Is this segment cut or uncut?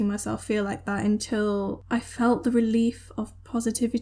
cut